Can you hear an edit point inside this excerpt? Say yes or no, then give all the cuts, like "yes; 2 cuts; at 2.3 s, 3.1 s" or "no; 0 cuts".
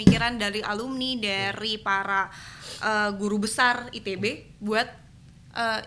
no; 0 cuts